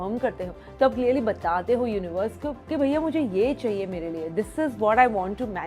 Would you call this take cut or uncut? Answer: uncut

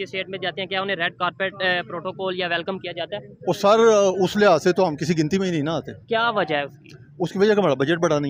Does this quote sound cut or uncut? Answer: uncut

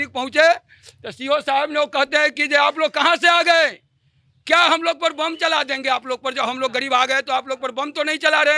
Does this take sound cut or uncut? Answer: uncut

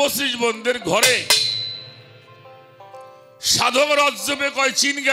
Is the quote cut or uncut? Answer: uncut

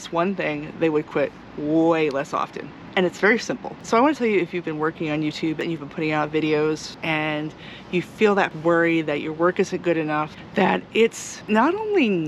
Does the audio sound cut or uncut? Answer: cut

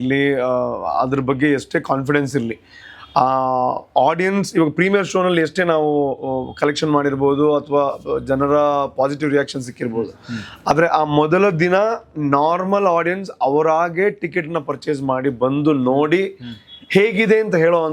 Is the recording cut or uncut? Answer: uncut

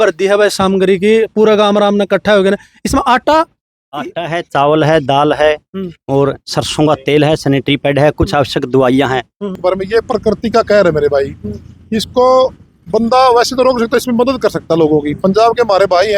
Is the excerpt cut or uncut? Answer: cut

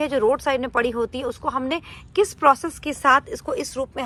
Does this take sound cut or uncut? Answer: uncut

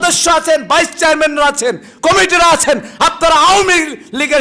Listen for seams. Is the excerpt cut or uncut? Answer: uncut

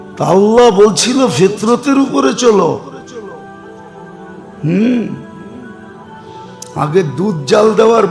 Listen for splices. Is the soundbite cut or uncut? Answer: uncut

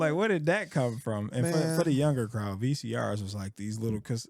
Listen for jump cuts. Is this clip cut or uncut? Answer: uncut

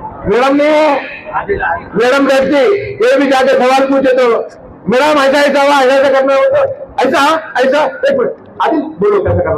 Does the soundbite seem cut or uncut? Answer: uncut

